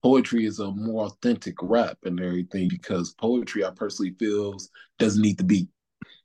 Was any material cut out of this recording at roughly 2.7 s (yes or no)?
yes